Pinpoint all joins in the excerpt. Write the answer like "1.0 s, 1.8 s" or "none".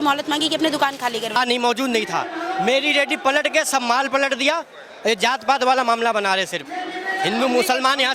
1.4 s